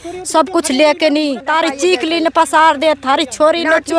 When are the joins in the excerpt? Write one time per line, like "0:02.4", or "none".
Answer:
0:01.5